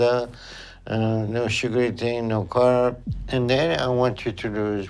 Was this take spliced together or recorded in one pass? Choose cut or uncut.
uncut